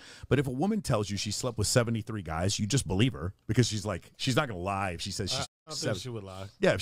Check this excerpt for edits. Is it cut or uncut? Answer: uncut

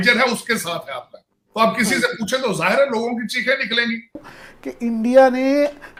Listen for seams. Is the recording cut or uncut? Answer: uncut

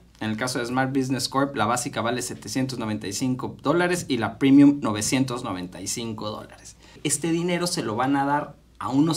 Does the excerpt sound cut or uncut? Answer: cut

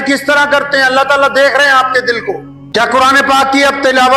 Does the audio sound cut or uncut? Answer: cut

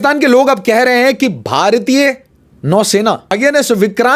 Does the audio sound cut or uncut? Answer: cut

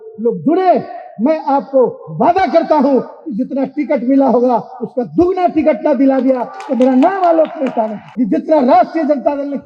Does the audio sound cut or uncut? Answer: cut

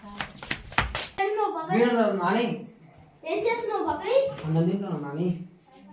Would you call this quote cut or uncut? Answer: cut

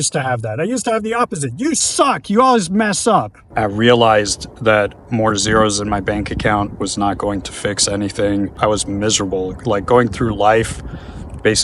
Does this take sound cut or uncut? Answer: cut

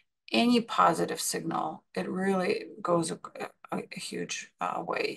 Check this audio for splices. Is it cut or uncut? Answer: uncut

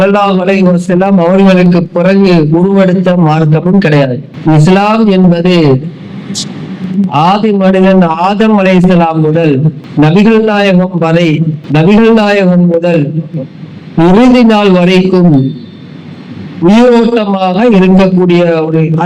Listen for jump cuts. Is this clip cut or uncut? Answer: cut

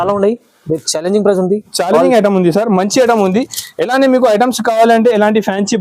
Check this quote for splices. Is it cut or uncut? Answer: uncut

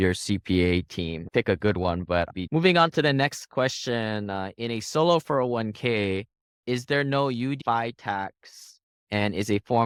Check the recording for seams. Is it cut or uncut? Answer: uncut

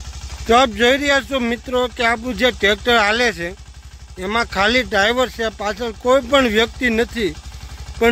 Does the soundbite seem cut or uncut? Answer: uncut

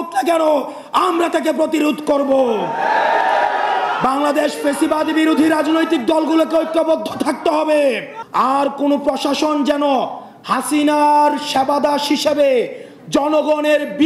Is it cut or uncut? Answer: cut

